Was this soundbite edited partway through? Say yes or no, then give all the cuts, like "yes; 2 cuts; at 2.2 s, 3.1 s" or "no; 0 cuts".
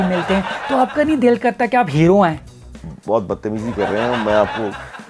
yes; 1 cut; at 2.9 s